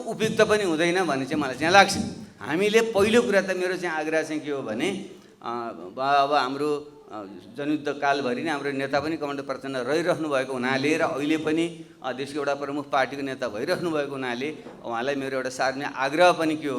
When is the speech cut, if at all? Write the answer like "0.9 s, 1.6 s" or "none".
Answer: none